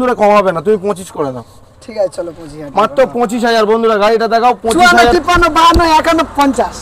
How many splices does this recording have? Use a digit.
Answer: 1